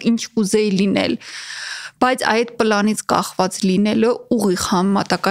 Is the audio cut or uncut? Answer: uncut